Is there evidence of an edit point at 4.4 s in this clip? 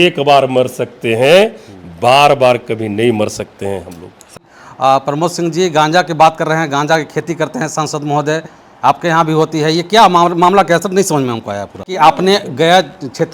yes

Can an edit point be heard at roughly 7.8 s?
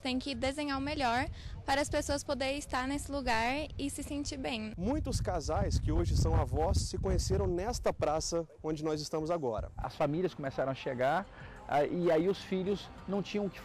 no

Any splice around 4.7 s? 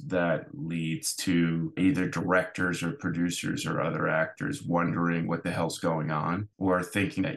no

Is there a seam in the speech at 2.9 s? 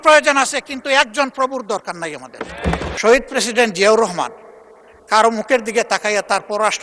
yes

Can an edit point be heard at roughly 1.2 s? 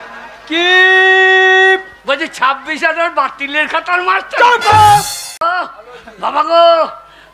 no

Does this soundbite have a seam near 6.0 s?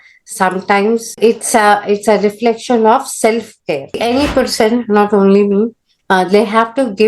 no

